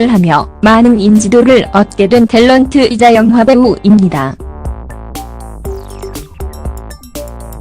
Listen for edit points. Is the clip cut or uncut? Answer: cut